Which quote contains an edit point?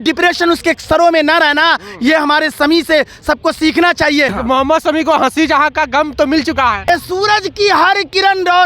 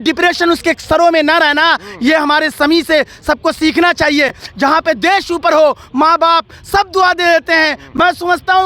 first; 2 cuts; at 4.4 s, 6.9 s

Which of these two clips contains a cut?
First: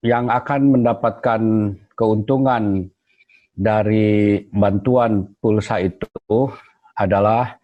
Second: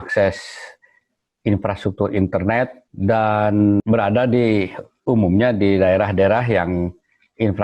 second; 2 cuts; at 2.8 s, 3.8 s

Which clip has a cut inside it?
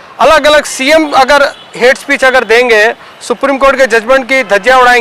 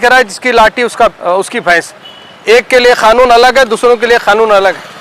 second; 1 cut; at 1.1 s

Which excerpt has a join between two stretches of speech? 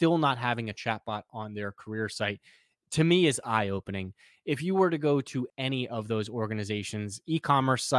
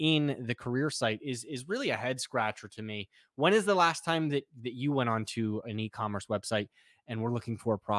first; 1 cut; at 5.5 s

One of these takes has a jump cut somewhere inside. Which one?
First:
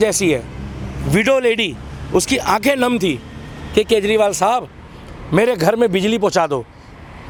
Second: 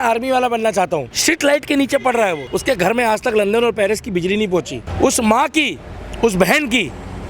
second; 3 cuts; at 1.1 s, 2.5 s, 4.8 s

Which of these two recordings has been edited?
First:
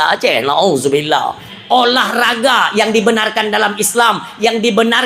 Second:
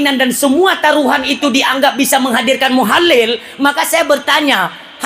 first; 1 cut; at 1.5 s

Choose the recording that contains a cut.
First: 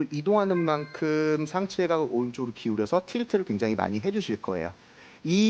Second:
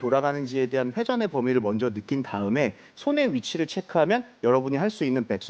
second; 1 cut; at 2.9 s

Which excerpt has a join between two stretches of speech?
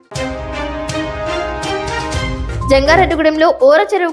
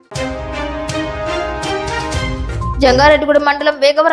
first; 1 cut; at 2.7 s

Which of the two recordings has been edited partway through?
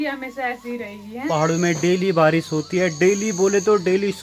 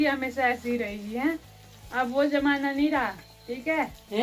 first; 1 cut; at 1.3 s

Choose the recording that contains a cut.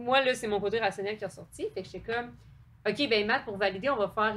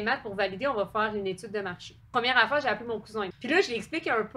second; 2 cuts; at 2.1 s, 3.4 s

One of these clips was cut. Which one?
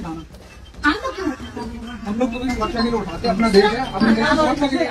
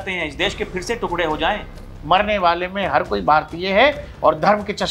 second; 1 cut; at 1.9 s

